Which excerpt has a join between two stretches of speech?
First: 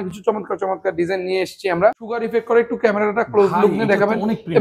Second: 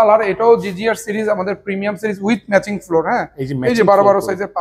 first; 1 cut; at 2.3 s

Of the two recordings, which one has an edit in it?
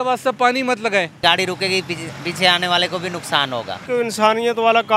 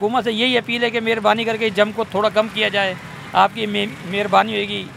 first; 2 cuts; at 1.2 s, 3.8 s

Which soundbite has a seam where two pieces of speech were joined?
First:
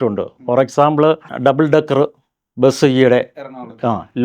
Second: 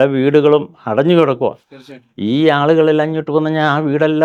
first; 1 cut; at 1.3 s

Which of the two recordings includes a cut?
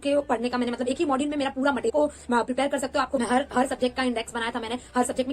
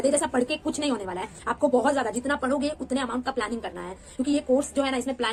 first; 2 cuts; at 1.9 s, 3.2 s

